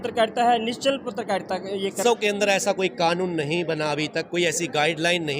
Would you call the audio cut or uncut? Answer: cut